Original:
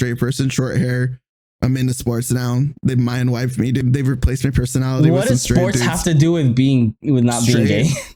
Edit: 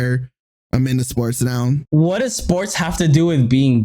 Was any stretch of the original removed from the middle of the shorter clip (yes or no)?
yes